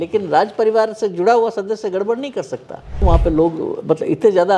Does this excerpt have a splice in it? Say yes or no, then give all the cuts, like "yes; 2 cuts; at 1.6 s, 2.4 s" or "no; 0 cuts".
yes; 1 cut; at 3.0 s